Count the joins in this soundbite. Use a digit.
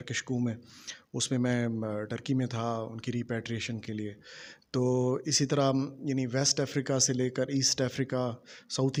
0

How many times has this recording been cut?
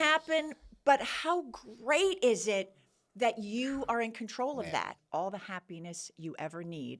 1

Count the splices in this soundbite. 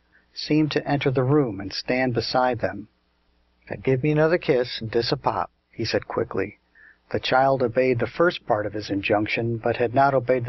0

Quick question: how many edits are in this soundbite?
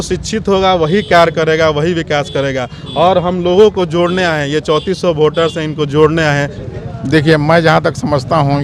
1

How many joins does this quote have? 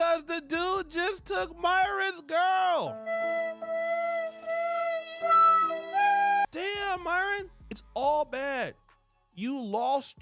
0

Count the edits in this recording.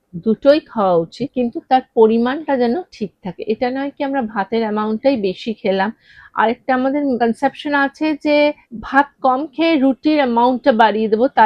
3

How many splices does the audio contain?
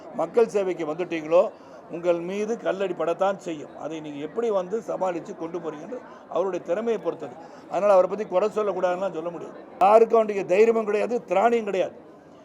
1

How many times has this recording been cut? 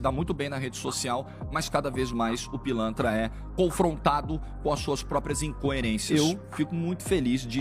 1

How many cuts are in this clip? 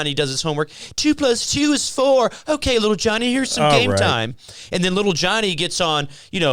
0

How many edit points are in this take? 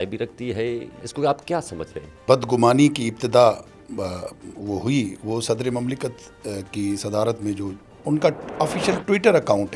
3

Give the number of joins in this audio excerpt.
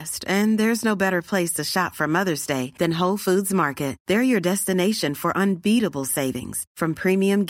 0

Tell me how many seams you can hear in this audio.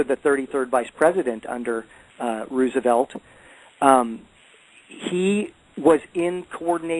0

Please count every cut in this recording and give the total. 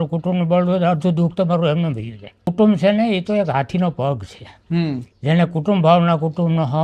1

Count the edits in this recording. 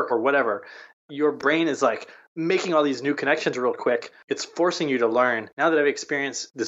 3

